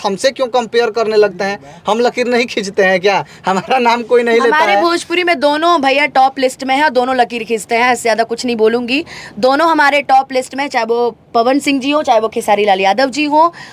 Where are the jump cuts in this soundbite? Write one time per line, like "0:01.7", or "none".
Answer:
none

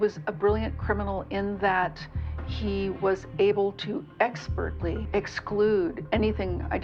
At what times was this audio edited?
0:05.0

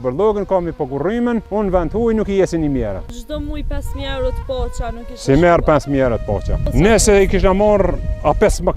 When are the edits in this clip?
0:01.5
0:03.2
0:06.6

